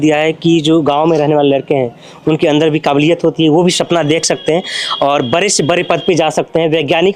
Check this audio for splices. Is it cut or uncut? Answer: uncut